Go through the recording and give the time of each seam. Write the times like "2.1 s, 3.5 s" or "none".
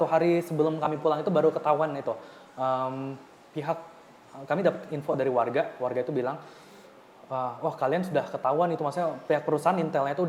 none